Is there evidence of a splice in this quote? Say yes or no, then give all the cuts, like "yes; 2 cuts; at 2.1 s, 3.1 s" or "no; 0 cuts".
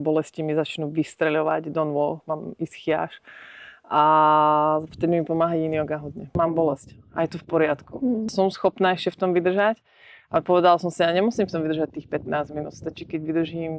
yes; 2 cuts; at 6.3 s, 8.3 s